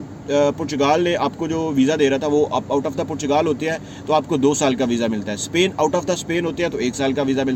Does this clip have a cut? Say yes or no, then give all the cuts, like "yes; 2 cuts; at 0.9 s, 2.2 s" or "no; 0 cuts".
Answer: no; 0 cuts